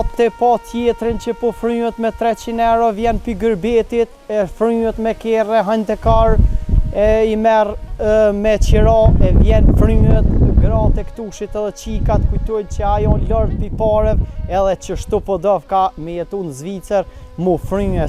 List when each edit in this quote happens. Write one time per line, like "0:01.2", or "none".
none